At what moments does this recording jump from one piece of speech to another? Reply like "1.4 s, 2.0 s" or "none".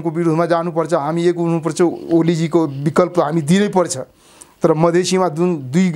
none